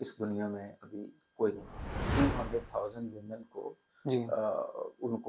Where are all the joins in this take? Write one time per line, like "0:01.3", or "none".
0:02.1